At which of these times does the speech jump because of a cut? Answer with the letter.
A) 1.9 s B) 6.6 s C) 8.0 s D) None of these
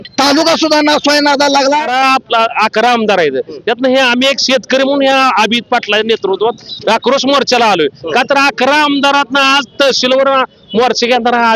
A